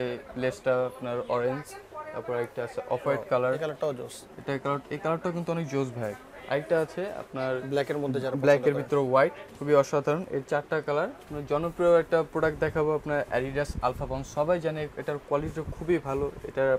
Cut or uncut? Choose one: cut